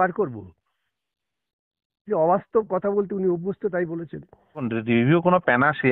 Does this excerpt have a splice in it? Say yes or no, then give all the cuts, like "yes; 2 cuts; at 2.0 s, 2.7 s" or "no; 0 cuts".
yes; 1 cut; at 4.7 s